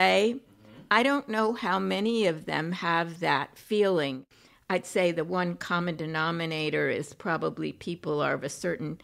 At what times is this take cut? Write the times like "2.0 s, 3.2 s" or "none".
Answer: 4.2 s

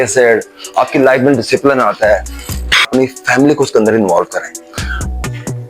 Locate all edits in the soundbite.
2.9 s

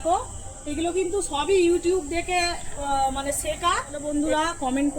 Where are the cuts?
4.1 s

